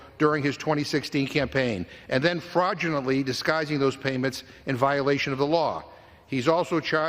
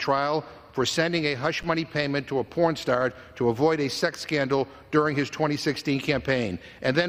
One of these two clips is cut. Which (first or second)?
first